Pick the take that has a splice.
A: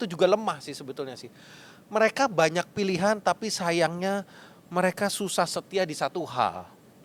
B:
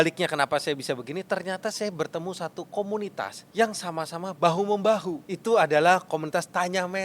B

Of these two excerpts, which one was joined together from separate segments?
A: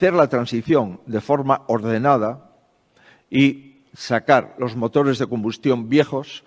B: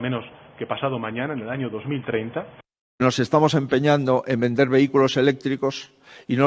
B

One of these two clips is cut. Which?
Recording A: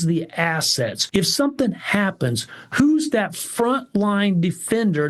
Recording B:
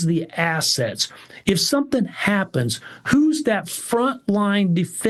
A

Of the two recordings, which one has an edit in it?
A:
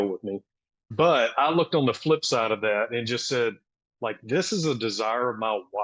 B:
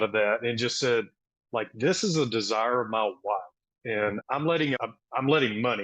B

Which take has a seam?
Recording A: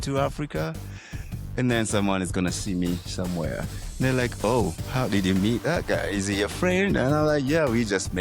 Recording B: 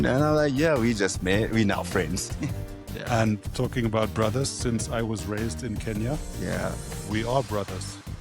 B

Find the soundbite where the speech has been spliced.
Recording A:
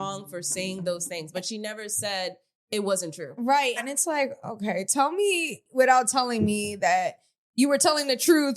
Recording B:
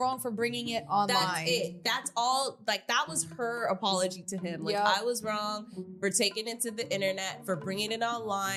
A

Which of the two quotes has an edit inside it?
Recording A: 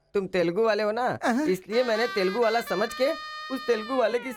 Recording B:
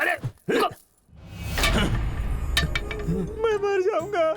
B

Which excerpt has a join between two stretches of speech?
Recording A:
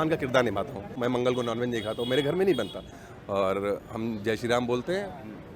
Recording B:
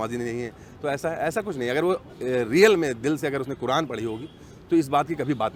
A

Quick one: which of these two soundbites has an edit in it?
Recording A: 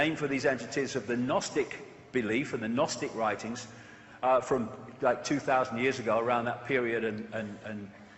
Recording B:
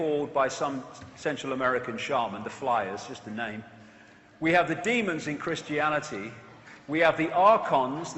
B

